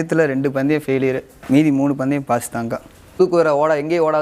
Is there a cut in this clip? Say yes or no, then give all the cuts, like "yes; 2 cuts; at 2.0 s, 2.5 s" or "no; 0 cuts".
yes; 1 cut; at 3.2 s